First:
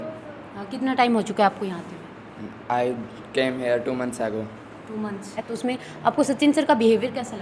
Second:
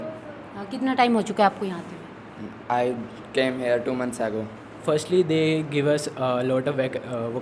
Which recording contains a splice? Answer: second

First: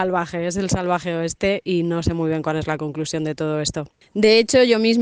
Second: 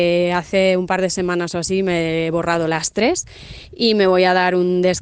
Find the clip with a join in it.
first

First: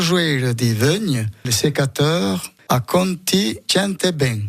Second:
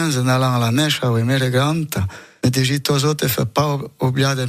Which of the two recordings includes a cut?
first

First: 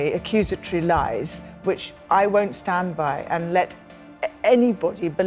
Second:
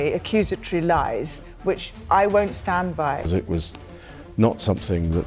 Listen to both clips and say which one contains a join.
second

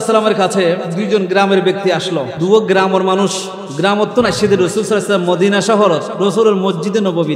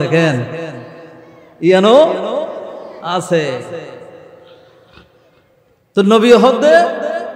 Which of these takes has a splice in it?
first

